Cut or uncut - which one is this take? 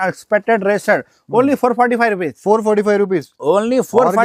uncut